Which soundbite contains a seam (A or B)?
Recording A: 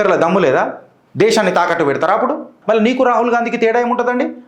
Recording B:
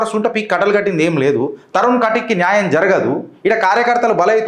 A